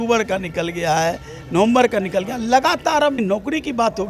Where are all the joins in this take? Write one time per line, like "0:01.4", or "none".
0:03.2